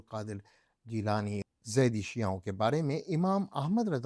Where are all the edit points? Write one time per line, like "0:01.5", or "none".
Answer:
0:01.4